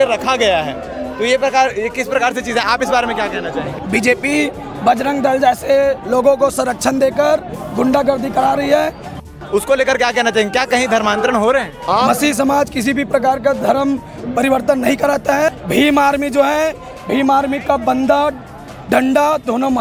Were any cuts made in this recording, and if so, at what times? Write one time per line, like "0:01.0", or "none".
0:03.7
0:09.2
0:12.1
0:15.5